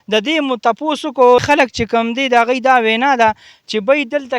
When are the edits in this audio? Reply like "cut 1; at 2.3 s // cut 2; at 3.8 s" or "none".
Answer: cut 1; at 1.6 s

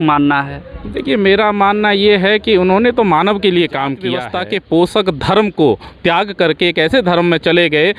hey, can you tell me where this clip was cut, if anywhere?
cut 1; at 4.3 s

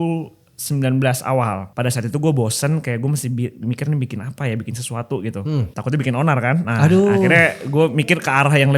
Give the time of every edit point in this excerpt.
cut 1; at 1.7 s // cut 2; at 5.7 s

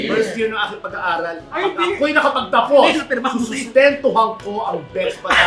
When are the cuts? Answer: cut 1; at 1.5 s

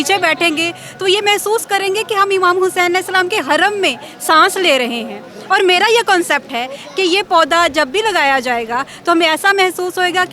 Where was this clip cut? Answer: none

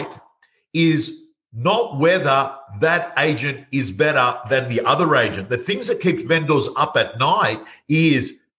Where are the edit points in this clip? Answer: none

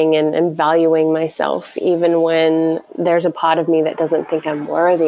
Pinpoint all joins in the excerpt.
none

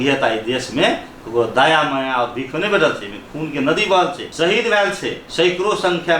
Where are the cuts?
cut 1; at 4.2 s // cut 2; at 5.2 s

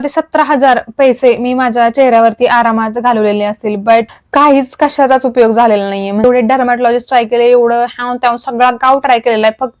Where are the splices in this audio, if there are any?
cut 1; at 4.2 s // cut 2; at 6.2 s

